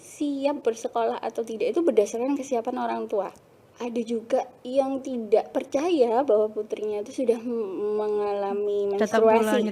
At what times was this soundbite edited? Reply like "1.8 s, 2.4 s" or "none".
3.3 s